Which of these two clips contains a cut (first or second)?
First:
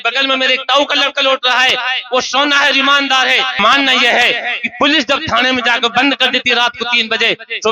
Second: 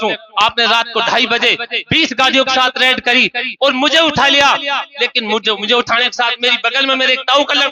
first